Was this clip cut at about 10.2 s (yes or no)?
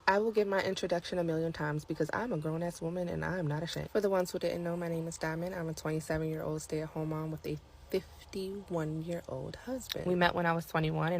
yes